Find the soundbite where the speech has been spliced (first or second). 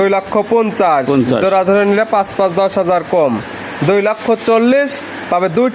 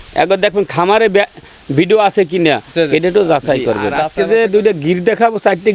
second